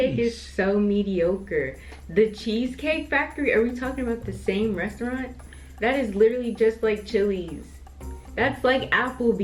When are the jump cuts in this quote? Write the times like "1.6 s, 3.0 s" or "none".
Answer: none